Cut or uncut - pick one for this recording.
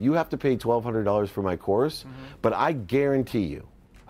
uncut